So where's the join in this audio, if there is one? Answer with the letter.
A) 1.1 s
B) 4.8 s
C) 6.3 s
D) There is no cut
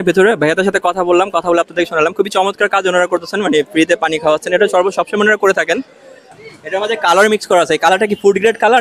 C